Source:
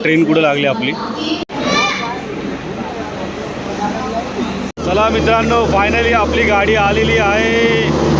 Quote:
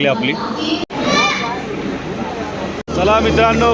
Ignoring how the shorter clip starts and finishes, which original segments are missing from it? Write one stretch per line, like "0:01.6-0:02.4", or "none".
0:03.4-0:04.7